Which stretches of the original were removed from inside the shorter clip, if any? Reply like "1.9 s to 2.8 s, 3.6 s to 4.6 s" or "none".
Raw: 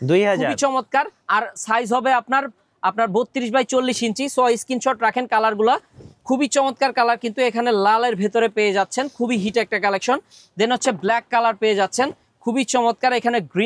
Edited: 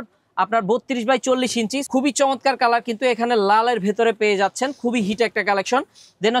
4.2 s to 6.1 s